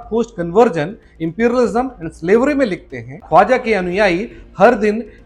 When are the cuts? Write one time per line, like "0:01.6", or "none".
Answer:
0:03.2